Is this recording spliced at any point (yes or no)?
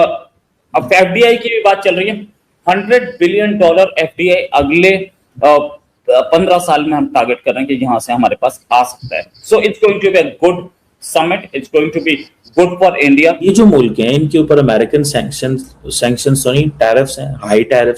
yes